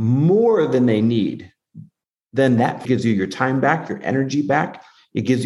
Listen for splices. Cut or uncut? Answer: cut